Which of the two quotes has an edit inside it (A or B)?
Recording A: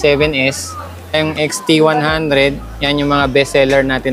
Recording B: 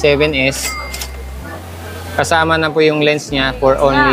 A